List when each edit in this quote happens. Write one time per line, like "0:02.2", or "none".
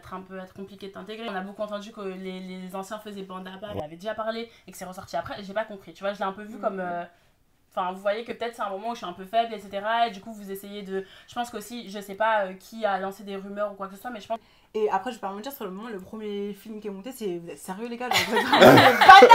0:01.3
0:03.8
0:14.4